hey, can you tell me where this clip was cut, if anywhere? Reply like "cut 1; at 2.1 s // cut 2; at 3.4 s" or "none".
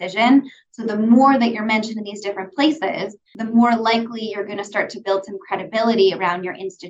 cut 1; at 3.3 s